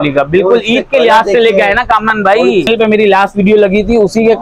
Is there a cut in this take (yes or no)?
yes